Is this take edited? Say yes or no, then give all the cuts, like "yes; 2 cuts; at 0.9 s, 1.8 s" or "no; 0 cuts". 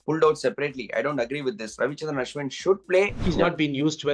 yes; 1 cut; at 3.2 s